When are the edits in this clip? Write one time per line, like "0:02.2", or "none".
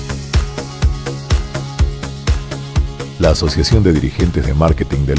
0:02.7